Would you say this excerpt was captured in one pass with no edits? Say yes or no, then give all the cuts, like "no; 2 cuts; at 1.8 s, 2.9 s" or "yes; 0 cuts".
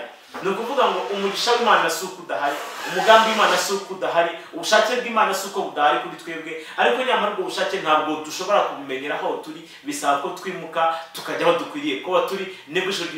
yes; 0 cuts